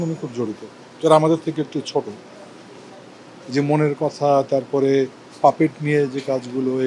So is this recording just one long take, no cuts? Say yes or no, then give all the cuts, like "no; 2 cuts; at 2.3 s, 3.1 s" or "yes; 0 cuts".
yes; 0 cuts